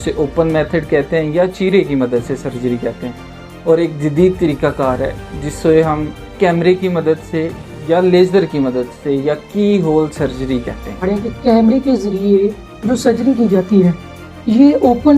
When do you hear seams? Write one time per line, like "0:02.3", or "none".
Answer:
0:11.0